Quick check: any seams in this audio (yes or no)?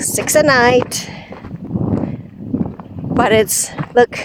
no